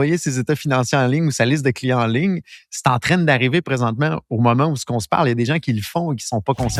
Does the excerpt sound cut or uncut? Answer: uncut